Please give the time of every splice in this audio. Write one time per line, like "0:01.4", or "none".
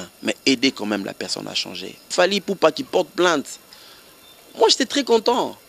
0:02.1